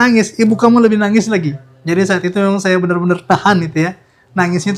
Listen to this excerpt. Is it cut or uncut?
uncut